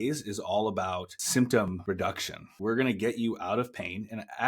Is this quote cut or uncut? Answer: cut